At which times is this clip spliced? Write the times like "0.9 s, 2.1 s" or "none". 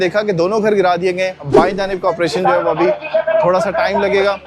1.5 s